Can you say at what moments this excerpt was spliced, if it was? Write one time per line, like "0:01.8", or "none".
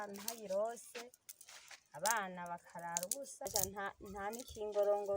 0:03.5